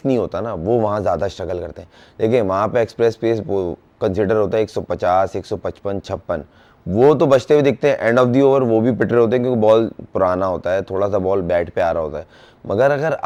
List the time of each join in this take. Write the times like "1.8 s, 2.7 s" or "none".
none